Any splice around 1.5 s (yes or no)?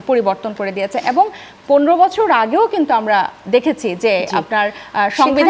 no